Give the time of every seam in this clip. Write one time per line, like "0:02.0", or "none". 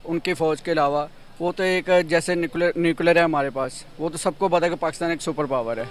none